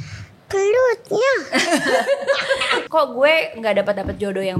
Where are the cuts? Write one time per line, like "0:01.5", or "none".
0:02.8